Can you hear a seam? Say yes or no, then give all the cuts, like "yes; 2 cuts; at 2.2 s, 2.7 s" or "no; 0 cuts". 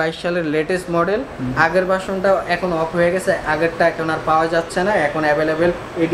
no; 0 cuts